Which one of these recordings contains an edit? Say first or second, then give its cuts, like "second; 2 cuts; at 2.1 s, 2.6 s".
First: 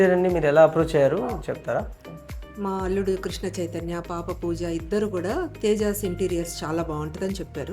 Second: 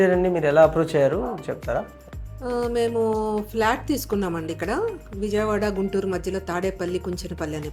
first; 1 cut; at 2.3 s